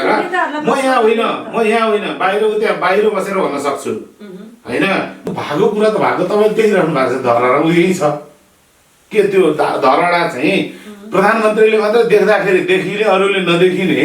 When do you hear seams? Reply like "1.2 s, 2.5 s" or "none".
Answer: 5.3 s